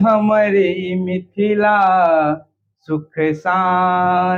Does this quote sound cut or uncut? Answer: uncut